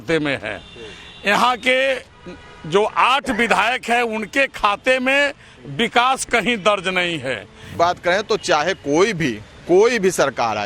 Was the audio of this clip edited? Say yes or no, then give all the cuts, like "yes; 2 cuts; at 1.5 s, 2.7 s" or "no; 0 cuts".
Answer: yes; 1 cut; at 7.7 s